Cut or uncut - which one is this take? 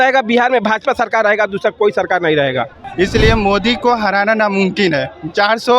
cut